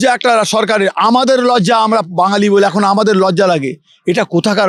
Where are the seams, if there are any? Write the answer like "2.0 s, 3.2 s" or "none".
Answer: none